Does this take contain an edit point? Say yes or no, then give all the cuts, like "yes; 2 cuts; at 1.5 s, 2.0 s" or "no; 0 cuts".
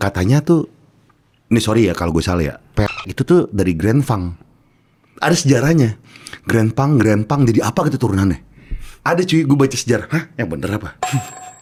no; 0 cuts